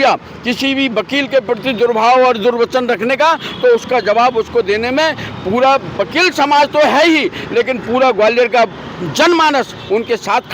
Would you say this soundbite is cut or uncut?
uncut